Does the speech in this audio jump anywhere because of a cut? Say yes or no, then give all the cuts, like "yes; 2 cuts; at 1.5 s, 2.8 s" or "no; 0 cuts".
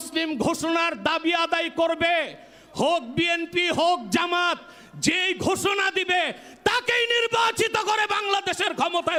no; 0 cuts